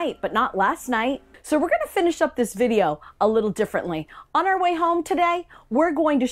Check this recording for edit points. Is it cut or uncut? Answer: uncut